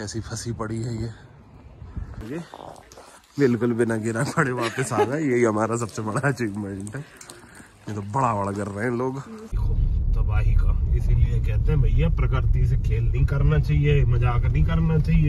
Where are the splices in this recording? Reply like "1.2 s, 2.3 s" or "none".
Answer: 2.2 s, 9.5 s